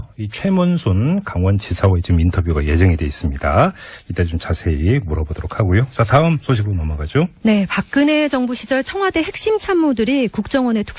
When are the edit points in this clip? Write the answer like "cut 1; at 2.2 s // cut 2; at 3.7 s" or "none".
none